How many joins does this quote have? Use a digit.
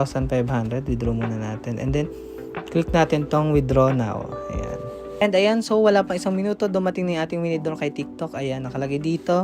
1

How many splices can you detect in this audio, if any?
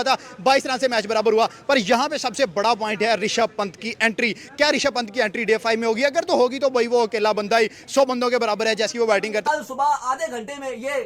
1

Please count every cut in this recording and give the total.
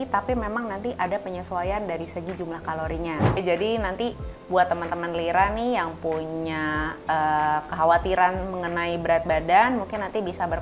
1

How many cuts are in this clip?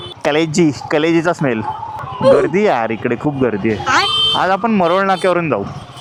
0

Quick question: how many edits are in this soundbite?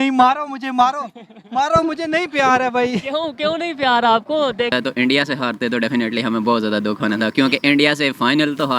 1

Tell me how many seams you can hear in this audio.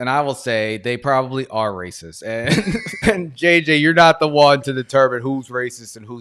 1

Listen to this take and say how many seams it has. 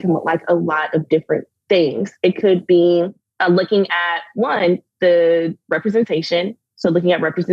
2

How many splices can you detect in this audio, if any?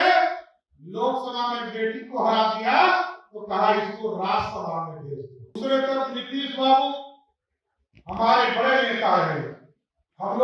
1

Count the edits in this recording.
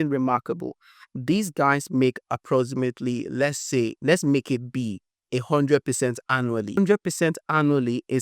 1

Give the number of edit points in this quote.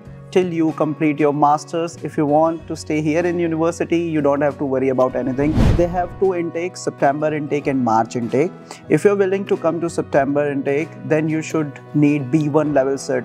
1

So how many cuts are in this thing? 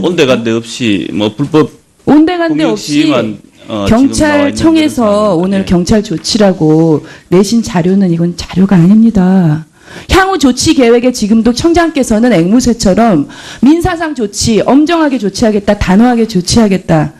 1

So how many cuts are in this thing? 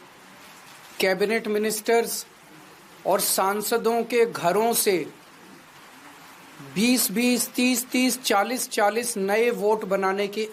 0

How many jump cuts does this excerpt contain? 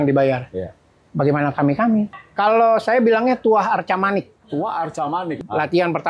3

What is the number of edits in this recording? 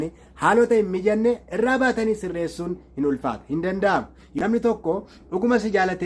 1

